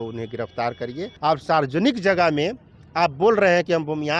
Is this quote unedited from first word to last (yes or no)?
no